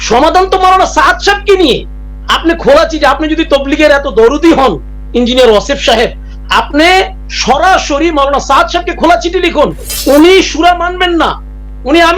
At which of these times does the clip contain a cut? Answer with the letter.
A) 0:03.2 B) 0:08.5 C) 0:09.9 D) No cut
C